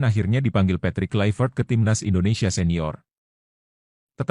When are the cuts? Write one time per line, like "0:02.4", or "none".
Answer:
0:02.6